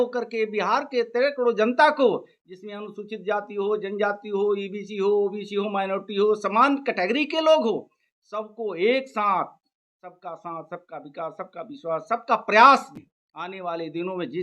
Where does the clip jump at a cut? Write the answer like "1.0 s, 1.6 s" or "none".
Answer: 13.0 s

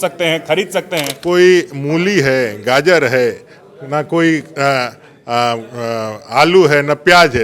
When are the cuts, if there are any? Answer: 1.2 s

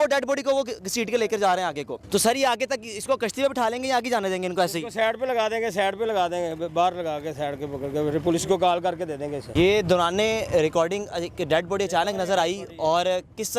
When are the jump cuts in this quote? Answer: 1.9 s, 9.4 s

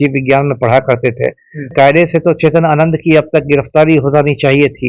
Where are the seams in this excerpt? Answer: 1.7 s

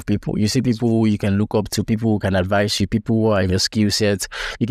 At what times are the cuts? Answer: none

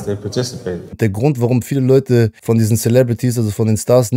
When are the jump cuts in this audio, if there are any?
1.0 s, 2.4 s

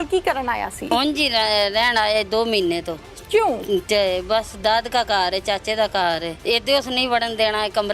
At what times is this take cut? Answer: 0.9 s, 6.3 s

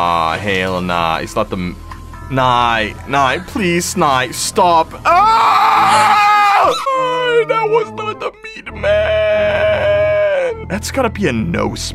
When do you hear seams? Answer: 6.9 s, 10.6 s

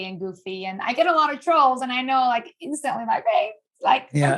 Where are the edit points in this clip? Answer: none

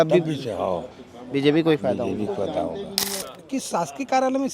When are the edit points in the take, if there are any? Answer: 3.3 s

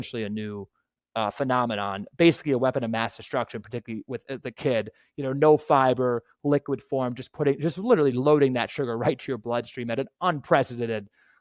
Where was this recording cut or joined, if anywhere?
none

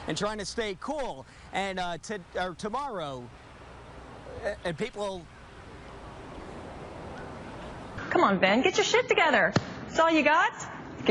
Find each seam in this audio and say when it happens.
8.1 s

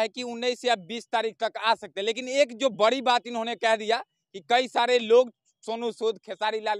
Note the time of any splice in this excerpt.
none

